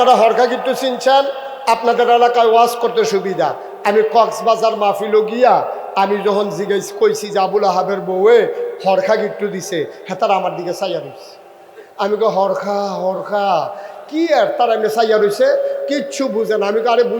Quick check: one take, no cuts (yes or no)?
yes